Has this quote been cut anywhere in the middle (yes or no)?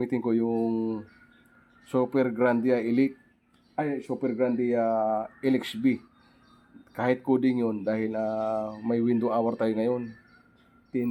no